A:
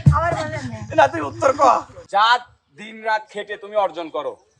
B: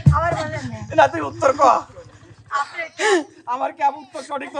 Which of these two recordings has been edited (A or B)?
A